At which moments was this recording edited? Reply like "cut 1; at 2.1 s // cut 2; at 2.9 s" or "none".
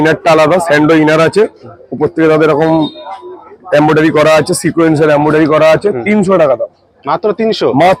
none